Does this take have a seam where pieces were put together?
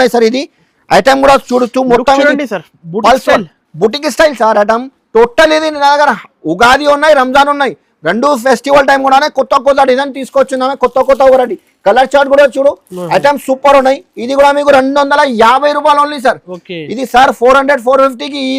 no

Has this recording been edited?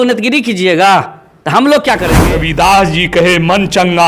yes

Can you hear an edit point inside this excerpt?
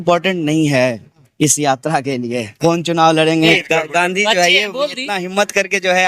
yes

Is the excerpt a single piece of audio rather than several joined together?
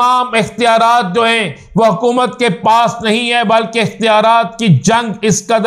yes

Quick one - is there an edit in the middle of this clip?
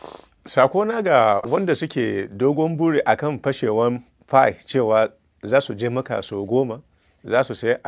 yes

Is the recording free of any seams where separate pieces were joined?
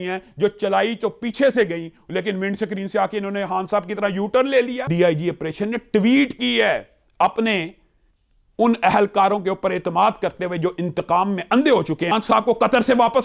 no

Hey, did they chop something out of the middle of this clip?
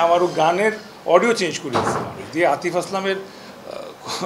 no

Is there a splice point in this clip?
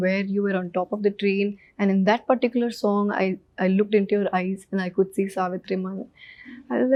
no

